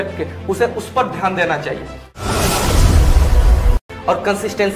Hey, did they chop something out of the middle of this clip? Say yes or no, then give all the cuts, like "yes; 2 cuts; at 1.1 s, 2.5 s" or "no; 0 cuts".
yes; 2 cuts; at 2.2 s, 3.8 s